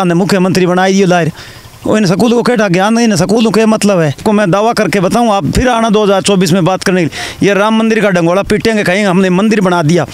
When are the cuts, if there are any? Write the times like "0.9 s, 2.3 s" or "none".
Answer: 4.2 s